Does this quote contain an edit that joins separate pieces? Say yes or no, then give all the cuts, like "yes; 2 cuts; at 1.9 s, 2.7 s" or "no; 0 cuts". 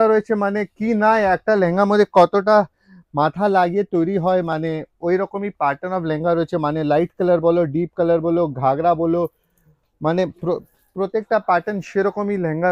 no; 0 cuts